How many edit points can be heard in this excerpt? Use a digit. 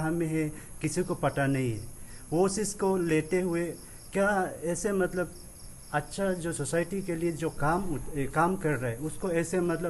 0